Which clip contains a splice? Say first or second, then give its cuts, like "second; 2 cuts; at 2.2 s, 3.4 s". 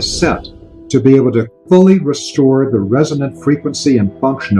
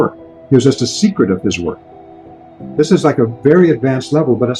second; 1 cut; at 2.1 s